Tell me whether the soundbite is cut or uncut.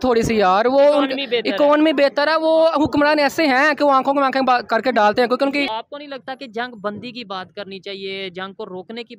cut